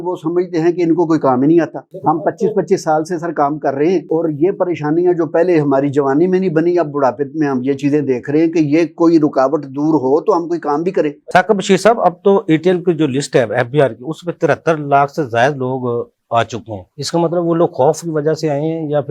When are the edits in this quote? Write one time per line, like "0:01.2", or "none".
none